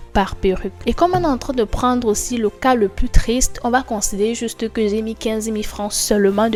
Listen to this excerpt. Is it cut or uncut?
uncut